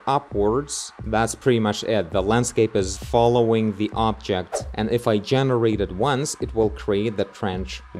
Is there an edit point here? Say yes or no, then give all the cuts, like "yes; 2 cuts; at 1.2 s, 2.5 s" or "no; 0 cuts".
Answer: yes; 2 cuts; at 3.0 s, 4.6 s